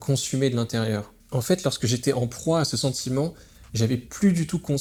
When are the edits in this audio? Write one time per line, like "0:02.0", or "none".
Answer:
none